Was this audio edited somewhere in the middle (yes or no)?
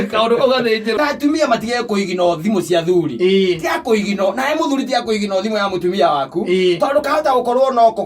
yes